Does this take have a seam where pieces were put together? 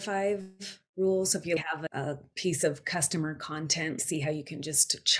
yes; 1 cut; at 1.6 s

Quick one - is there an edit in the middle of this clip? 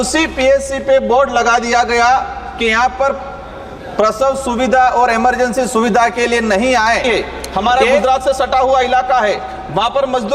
yes; 1 cut; at 7.0 s

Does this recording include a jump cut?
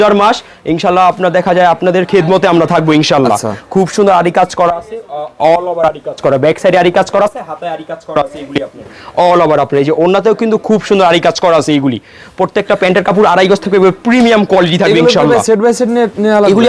no; 0 cuts

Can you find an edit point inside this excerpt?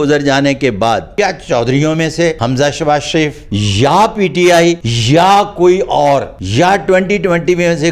yes; 5 cuts; at 1.1 s, 2.4 s, 3.4 s, 4.9 s, 6.4 s

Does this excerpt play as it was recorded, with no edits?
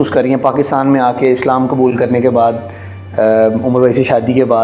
yes; 0 cuts

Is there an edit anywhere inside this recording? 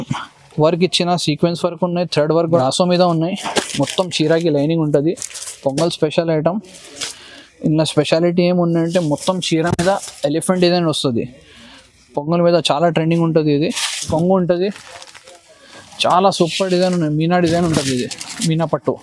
yes; 2 cuts; at 2.6 s, 14.1 s

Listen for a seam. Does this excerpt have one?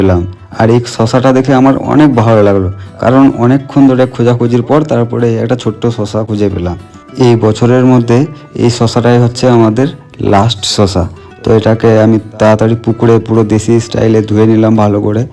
no; 0 cuts

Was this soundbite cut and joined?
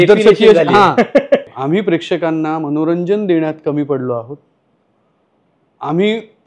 yes; 1 cut; at 1.5 s

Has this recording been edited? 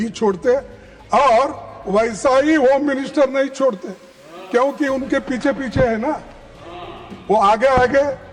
no; 0 cuts

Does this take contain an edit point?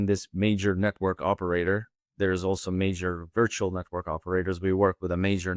no; 0 cuts

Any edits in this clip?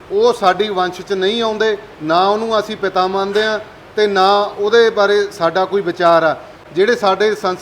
no; 0 cuts

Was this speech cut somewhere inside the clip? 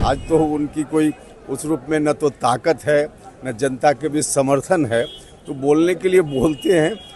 no; 0 cuts

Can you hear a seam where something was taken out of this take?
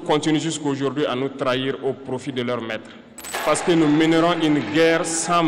yes; 1 cut; at 3.2 s

